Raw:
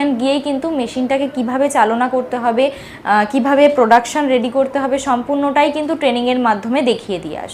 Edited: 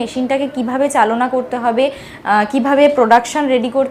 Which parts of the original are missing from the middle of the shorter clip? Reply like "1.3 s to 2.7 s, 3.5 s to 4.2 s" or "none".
none